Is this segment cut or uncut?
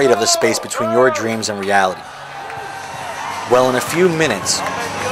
uncut